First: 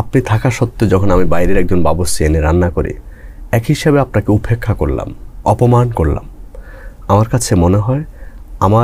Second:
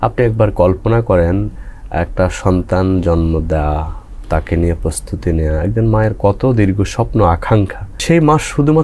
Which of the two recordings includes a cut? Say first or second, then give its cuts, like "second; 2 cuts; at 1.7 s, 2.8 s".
second; 1 cut; at 7.9 s